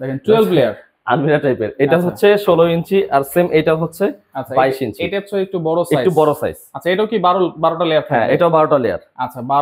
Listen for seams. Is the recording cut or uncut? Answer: uncut